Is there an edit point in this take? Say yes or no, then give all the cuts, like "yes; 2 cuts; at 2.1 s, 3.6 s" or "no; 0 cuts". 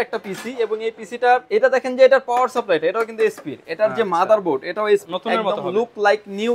yes; 2 cuts; at 1.5 s, 5.1 s